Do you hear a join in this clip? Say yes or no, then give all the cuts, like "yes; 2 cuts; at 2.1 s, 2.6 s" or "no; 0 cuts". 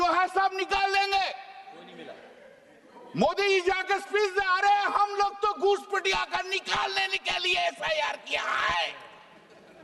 no; 0 cuts